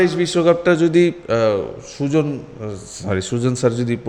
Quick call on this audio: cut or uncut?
uncut